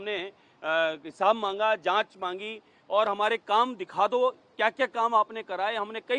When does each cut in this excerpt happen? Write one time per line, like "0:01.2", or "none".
none